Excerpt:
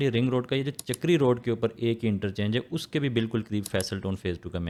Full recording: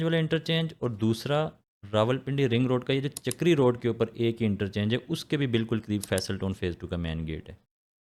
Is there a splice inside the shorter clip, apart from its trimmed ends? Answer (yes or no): no